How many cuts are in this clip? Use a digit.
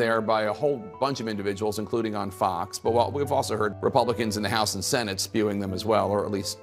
0